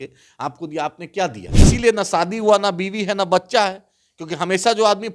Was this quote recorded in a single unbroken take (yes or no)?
no